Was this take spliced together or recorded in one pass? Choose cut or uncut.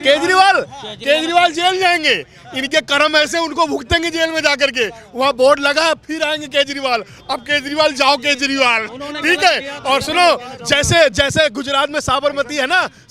uncut